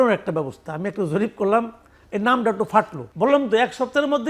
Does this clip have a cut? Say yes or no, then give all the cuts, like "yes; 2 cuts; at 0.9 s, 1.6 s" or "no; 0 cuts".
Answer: yes; 1 cut; at 3.0 s